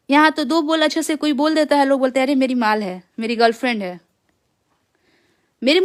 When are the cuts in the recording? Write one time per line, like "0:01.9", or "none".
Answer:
none